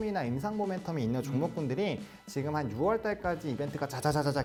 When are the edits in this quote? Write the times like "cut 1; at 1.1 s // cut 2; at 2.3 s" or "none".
none